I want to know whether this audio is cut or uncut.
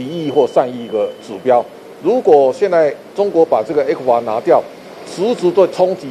uncut